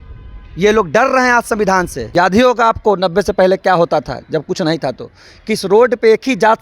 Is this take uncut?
no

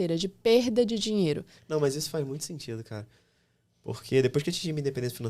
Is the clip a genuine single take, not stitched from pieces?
no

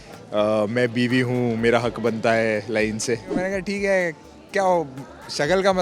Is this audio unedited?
no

